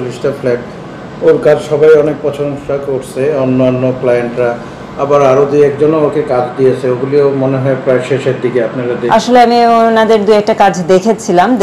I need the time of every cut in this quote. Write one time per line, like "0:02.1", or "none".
0:09.1